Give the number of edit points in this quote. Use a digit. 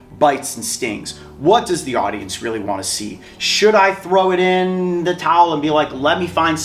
0